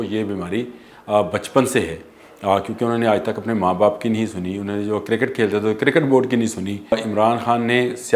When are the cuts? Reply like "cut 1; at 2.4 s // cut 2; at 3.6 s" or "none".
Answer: cut 1; at 6.9 s